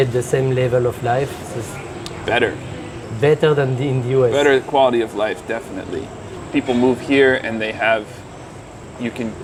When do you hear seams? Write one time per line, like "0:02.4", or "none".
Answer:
none

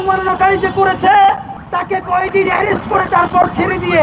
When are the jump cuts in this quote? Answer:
0:01.5

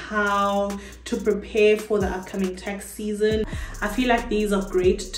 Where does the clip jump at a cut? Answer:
0:03.5

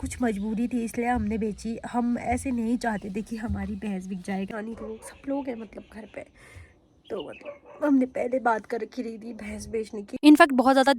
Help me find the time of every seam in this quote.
0:04.5
0:10.1

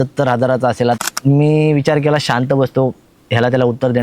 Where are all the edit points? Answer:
0:01.0

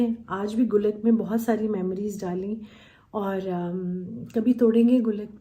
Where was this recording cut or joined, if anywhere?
none

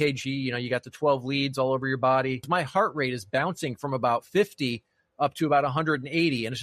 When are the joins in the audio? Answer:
0:02.4

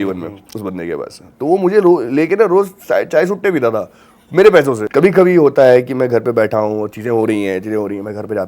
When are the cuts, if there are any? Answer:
0:04.8

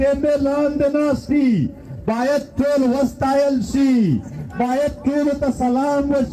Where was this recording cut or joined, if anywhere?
none

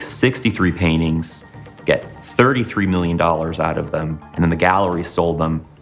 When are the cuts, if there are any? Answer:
0:04.2

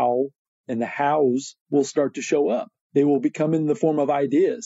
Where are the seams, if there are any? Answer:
0:02.8

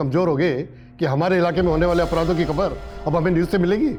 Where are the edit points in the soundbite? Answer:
none

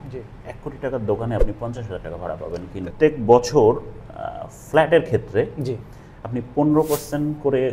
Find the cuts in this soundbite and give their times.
0:02.8

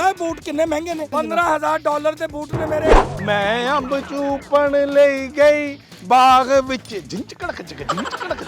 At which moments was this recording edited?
0:01.1
0:03.0

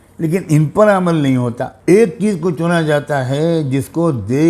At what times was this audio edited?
0:01.7

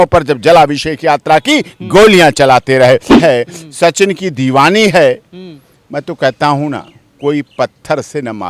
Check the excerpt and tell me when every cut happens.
0:03.2

